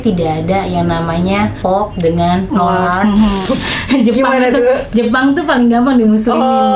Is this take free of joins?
no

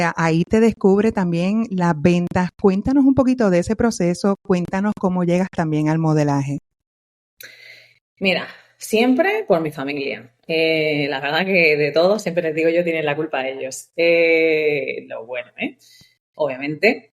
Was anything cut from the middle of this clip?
no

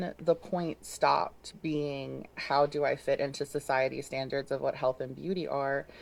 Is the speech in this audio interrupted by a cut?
yes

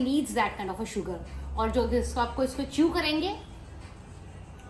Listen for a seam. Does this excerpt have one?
no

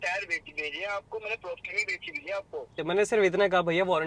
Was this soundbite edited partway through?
yes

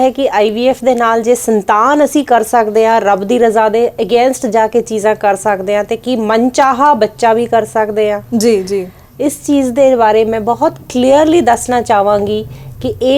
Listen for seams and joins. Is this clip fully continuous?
yes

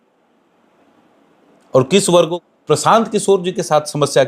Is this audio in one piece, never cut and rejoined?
no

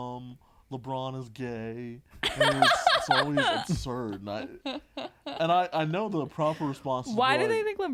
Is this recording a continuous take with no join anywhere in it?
yes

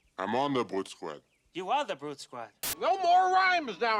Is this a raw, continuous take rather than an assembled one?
no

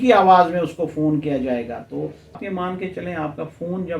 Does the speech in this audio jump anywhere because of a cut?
yes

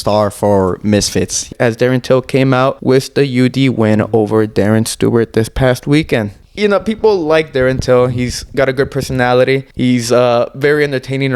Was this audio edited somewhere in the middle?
yes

